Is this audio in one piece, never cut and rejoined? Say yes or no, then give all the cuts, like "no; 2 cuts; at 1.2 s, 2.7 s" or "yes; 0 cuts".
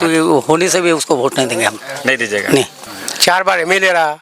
no; 1 cut; at 2.8 s